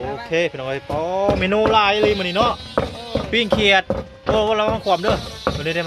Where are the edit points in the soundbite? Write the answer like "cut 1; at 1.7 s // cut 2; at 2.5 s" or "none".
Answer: none